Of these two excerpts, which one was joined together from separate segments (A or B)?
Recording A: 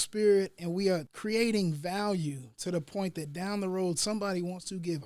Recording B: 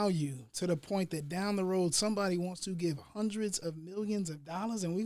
A